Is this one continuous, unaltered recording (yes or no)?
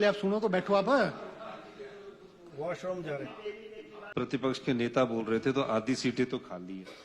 no